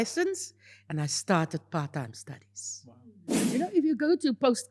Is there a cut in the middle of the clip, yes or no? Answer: yes